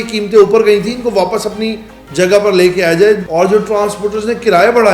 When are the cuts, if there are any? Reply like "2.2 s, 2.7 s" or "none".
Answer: 3.2 s